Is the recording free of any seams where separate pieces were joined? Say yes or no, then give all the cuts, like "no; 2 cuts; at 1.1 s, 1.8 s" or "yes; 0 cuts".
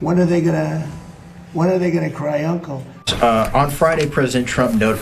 no; 1 cut; at 2.8 s